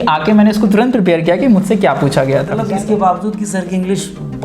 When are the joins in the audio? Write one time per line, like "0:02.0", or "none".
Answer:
0:02.6